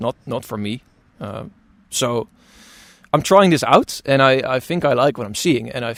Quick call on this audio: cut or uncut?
uncut